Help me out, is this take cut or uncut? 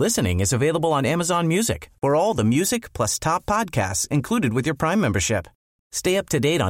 uncut